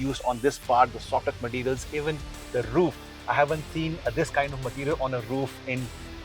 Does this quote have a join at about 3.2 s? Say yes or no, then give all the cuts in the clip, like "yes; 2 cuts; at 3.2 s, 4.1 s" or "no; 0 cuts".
no; 0 cuts